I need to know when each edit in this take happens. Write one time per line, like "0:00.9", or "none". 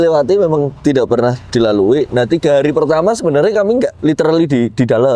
0:03.9